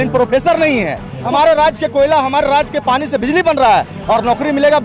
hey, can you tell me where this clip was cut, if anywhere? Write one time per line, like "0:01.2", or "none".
0:01.1